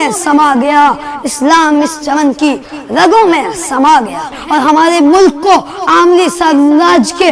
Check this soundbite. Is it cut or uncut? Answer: cut